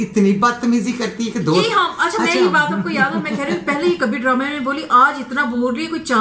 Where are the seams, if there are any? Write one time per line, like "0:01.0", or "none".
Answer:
none